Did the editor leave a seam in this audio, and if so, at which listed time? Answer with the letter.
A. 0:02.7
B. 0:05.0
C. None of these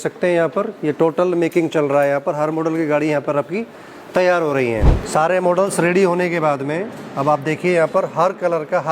B